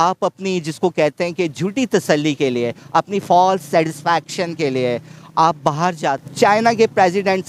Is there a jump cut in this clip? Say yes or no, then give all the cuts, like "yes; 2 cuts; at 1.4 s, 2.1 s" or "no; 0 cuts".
yes; 1 cut; at 6.3 s